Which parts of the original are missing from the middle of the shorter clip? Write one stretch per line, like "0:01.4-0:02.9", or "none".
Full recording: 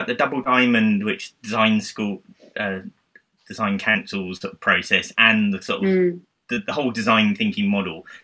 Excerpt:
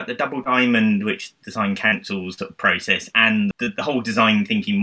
0:01.3-0:03.4
0:05.6-0:06.5